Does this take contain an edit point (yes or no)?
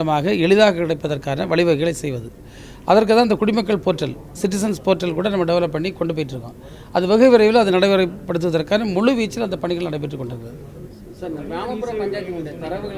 no